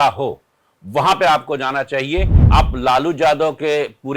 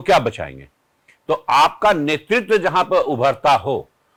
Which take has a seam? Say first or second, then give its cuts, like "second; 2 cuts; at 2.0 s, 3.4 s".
first; 1 cut; at 2.4 s